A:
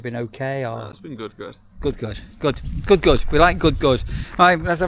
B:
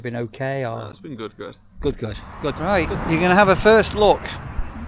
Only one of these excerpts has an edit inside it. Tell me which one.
B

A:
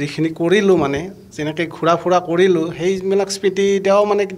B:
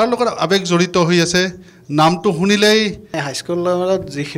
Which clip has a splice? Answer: B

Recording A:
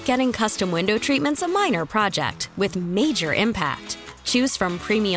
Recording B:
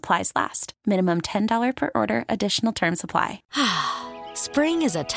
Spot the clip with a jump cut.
B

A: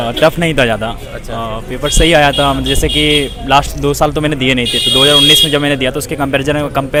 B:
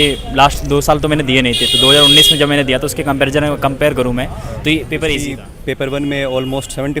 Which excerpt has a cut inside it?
B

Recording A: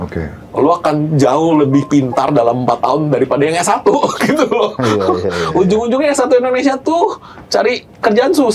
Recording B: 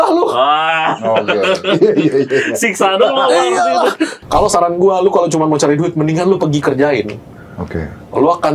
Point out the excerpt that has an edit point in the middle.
B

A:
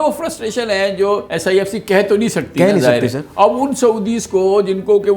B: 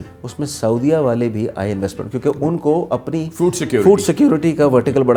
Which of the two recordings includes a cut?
A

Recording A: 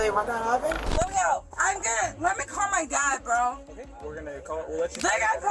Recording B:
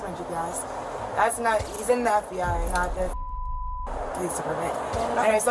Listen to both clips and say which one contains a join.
A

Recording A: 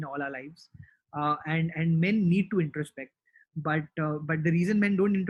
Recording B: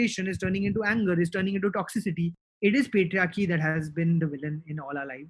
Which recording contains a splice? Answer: B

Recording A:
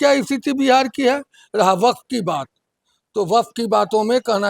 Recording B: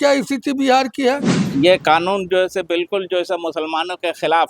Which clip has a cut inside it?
B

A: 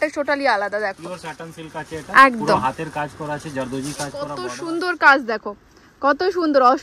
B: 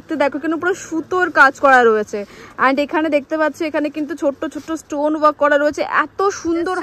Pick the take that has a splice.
A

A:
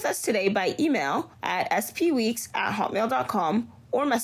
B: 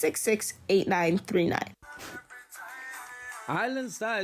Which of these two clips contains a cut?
B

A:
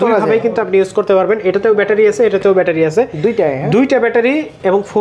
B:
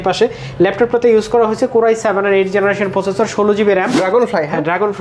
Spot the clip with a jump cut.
B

